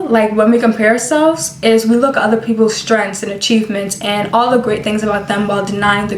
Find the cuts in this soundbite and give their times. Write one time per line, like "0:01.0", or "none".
none